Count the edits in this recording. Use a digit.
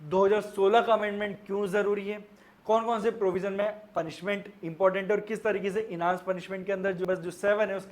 1